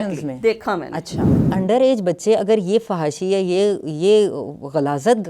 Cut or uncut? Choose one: cut